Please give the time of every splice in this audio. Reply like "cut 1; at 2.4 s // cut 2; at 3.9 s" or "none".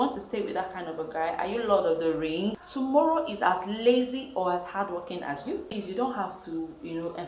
cut 1; at 2.6 s // cut 2; at 5.7 s